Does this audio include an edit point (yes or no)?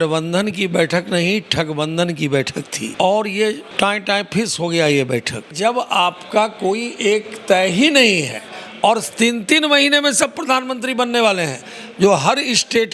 yes